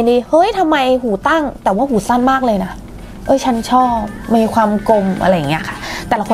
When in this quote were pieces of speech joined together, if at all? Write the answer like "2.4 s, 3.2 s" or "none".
none